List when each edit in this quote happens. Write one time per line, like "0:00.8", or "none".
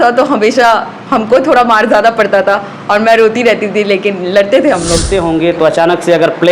0:05.1